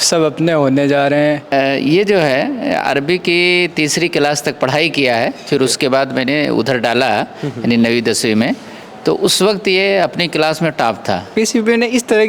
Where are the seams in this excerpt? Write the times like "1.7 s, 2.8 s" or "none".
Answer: 1.5 s, 11.2 s